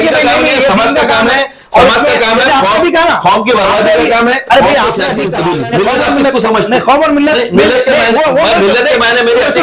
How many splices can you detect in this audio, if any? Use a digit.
1